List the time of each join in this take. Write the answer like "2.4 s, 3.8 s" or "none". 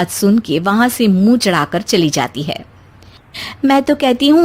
none